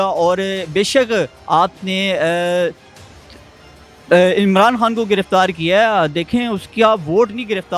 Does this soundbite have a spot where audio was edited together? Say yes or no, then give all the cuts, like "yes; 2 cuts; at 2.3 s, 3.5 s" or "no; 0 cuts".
no; 0 cuts